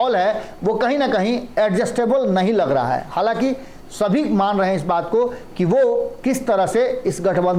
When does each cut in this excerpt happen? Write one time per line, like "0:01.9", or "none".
none